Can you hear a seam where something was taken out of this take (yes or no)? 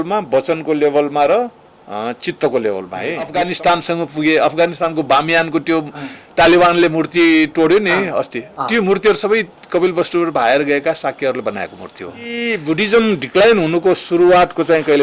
yes